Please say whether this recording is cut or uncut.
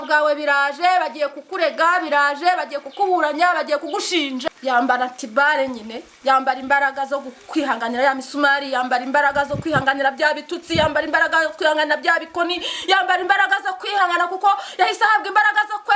cut